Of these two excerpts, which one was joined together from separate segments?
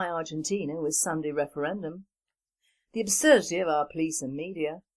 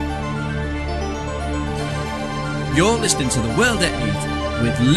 first; 1 cut; at 3.5 s

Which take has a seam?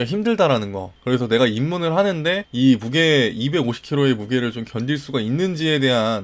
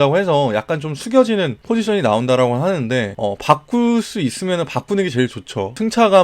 second; 2 cuts; at 1.6 s, 3.1 s

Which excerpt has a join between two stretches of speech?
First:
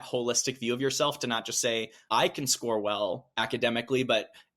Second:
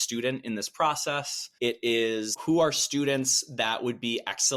first; 2 cuts; at 1.9 s, 3.3 s

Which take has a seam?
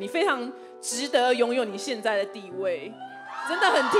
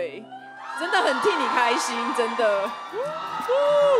second; 1 cut; at 2.9 s

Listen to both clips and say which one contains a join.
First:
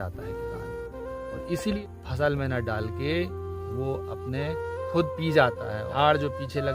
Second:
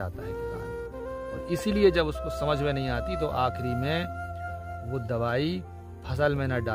first; 2 cuts; at 1.8 s, 5.9 s

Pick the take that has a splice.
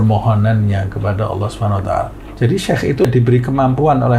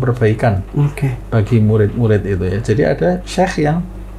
first; 2 cuts; at 2.2 s, 3.1 s

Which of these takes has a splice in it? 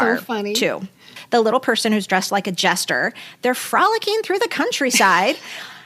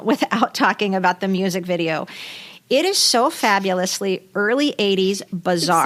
first; 1 cut; at 1.1 s

